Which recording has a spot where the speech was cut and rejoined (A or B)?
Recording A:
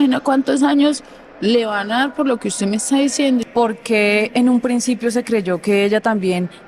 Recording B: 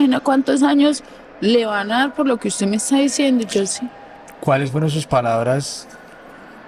A